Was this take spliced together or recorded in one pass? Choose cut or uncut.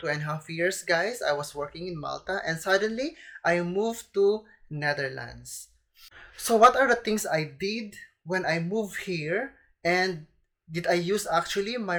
uncut